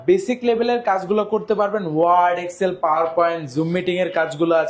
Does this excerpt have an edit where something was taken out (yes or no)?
no